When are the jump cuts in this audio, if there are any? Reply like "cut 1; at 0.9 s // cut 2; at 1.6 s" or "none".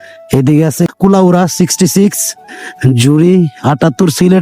cut 1; at 0.9 s

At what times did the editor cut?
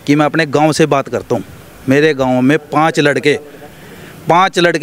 none

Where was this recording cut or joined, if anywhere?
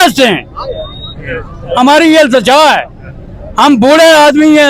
none

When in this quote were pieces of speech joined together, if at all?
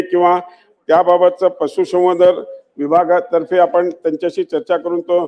none

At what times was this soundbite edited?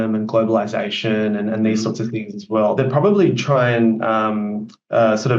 cut 1; at 2.8 s

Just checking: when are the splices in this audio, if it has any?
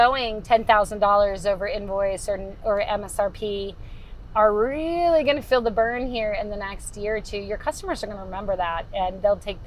none

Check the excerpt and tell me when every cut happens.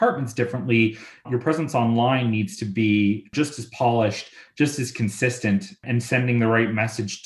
cut 1; at 1.3 s // cut 2; at 3.3 s // cut 3; at 5.8 s

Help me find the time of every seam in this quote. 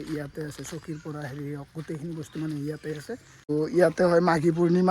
cut 1; at 3.5 s

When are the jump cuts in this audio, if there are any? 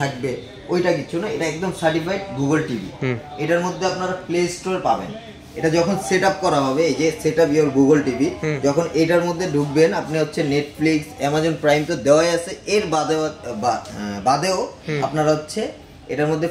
none

